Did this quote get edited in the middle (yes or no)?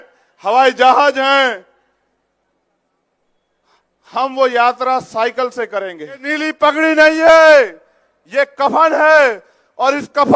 yes